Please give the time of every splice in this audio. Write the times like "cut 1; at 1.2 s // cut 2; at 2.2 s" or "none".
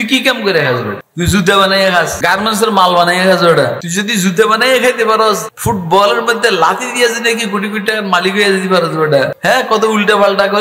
cut 1; at 1.0 s // cut 2; at 2.1 s // cut 3; at 3.8 s // cut 4; at 5.5 s // cut 5; at 9.4 s